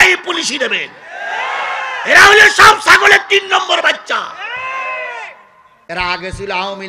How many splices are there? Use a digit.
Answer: 1